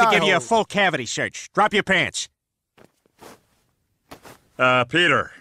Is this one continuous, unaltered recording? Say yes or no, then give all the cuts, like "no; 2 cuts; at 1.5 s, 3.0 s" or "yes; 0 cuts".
yes; 0 cuts